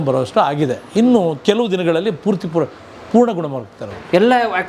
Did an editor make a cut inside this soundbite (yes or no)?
no